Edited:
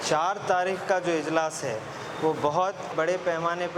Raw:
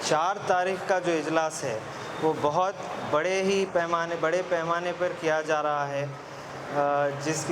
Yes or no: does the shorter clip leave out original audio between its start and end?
yes